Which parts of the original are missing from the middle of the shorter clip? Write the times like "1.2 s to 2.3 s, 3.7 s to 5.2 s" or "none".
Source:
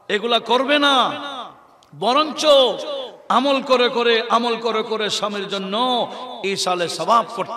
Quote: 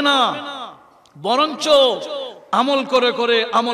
none